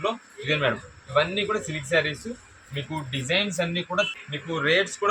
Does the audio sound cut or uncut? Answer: cut